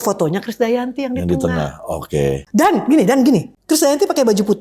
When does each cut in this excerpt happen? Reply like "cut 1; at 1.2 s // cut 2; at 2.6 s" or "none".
cut 1; at 2.4 s // cut 2; at 3.5 s